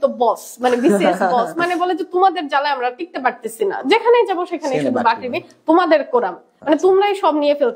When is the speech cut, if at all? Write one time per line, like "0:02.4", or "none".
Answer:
none